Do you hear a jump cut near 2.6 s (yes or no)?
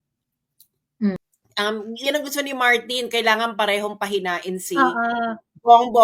no